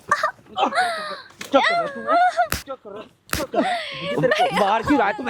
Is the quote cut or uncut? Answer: uncut